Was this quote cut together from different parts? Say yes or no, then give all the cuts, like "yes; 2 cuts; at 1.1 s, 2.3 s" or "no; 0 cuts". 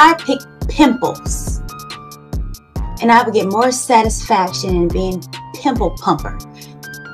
yes; 3 cuts; at 1.1 s, 3.0 s, 6.3 s